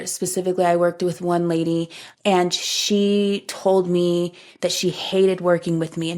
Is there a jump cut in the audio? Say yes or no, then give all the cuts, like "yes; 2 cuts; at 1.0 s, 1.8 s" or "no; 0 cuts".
no; 0 cuts